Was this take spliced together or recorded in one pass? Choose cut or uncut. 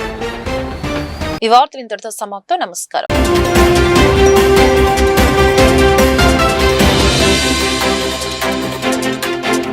uncut